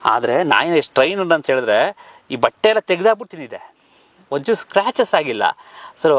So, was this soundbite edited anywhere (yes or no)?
no